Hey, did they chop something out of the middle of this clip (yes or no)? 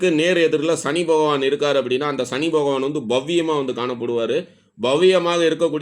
no